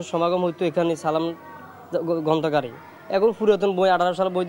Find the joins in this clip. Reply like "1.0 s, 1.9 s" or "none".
none